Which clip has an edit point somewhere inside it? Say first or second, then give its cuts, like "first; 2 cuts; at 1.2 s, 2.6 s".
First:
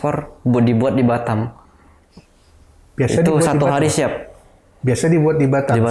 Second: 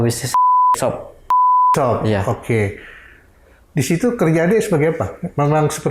second; 1 cut; at 1.2 s